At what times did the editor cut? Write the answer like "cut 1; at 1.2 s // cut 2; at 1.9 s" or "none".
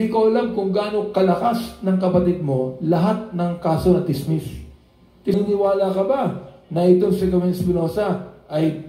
cut 1; at 5.3 s

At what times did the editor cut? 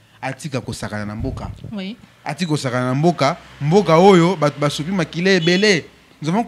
none

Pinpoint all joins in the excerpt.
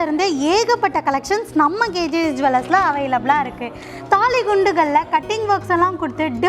none

